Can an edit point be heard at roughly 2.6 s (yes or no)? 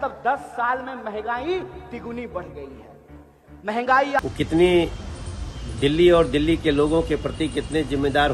no